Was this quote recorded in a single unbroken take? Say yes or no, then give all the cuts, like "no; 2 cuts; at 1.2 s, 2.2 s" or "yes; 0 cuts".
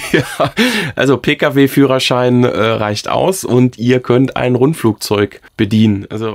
no; 1 cut; at 5.4 s